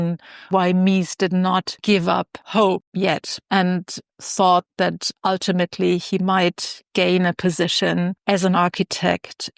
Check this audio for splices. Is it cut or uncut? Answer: cut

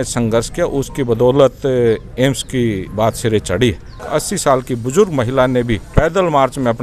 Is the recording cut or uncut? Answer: cut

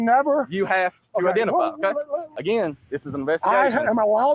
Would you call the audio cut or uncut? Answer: cut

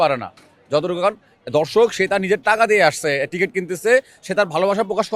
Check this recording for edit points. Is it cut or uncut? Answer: uncut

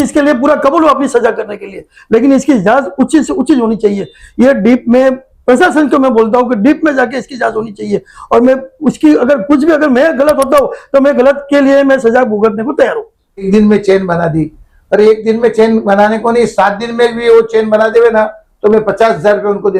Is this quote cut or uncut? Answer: cut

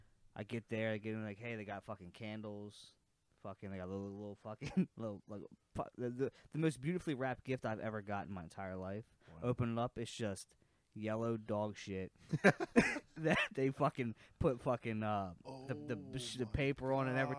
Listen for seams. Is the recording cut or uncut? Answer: uncut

